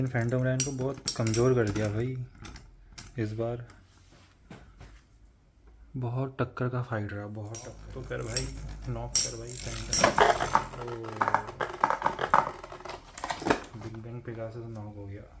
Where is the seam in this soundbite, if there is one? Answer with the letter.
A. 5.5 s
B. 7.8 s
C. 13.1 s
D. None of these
B